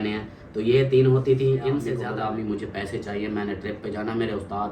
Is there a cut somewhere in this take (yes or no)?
yes